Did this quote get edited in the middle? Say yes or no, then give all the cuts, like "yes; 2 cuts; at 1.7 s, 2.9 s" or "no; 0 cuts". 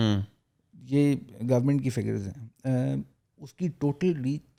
no; 0 cuts